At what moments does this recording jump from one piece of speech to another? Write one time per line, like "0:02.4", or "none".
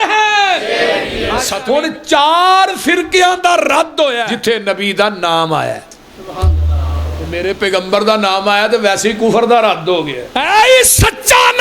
0:01.5
0:04.3
0:07.3
0:10.2